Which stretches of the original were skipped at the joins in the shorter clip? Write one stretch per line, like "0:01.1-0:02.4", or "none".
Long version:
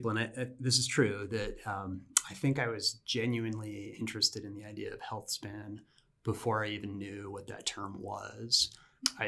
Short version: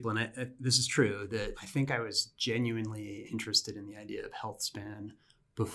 0:01.6-0:02.3

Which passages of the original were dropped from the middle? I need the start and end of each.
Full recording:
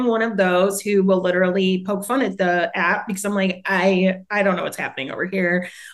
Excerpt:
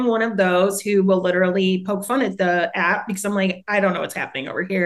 0:03.6-0:04.2

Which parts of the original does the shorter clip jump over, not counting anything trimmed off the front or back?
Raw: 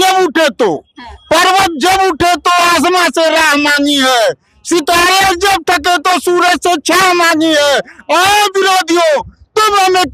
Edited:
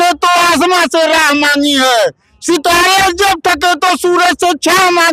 none

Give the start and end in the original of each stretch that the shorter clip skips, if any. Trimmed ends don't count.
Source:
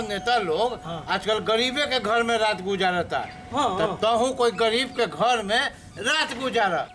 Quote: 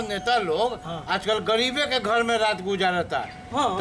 none

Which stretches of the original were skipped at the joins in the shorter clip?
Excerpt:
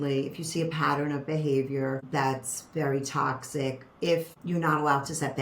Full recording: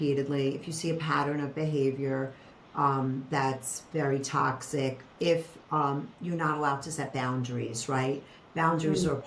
0:02.3-0:03.2
0:05.6-0:06.1

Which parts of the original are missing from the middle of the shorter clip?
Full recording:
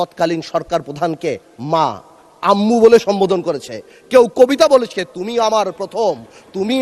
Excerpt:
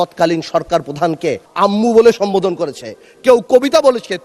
0:01.5-0:02.3

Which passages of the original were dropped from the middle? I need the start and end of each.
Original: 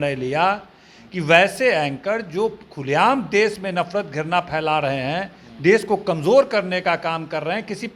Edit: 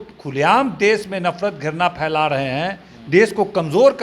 none

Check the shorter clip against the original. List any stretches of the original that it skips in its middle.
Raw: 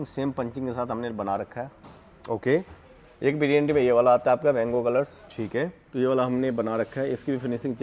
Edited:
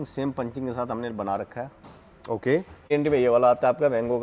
0:02.9-0:03.5

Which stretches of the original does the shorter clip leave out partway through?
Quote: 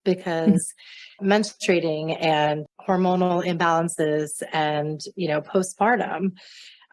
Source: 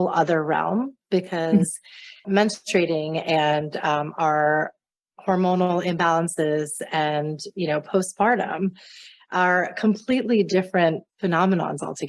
0:03.7-0:05.1

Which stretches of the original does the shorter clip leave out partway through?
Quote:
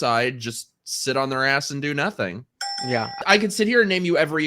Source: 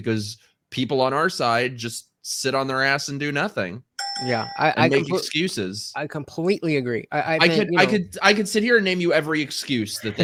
0:04.5-0:08.1

